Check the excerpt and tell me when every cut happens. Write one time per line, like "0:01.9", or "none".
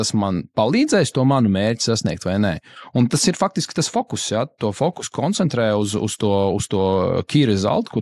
none